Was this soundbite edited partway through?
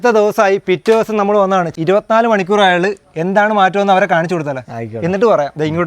yes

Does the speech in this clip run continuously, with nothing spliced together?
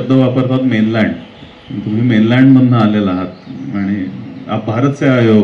yes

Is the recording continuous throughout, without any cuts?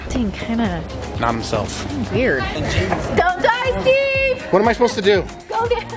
no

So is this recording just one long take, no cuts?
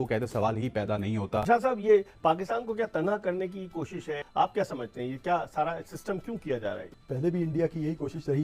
no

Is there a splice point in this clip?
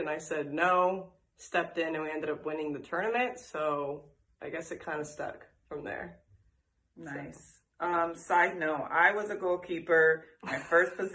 no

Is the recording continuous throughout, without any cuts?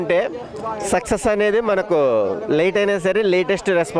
yes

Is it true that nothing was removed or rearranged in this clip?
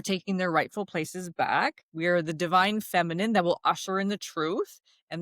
no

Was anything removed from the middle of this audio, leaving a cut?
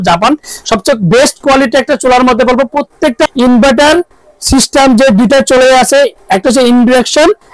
yes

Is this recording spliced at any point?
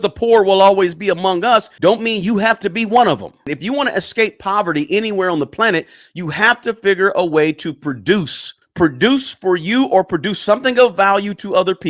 yes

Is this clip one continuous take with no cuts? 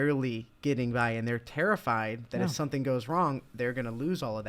yes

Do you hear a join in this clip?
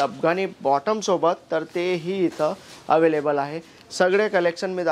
no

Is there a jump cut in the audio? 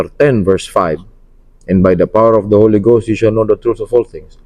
no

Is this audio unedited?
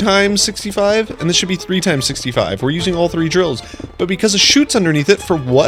yes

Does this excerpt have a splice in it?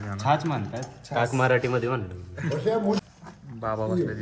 yes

